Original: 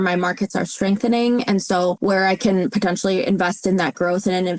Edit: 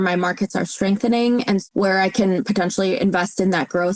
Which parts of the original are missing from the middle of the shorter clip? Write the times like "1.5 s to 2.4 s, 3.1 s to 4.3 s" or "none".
1.7 s to 1.9 s